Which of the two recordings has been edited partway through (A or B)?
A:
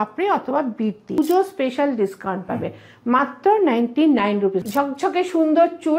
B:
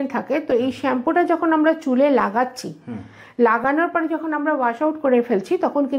A